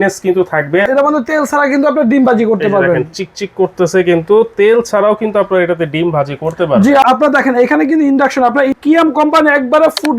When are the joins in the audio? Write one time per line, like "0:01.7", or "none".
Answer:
0:00.8
0:07.0
0:08.7